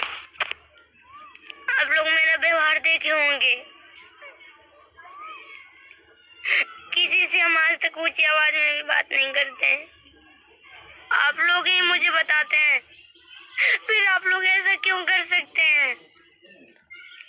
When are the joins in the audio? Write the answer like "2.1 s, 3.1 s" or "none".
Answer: 10.9 s